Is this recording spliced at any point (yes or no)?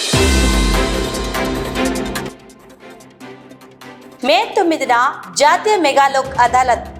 no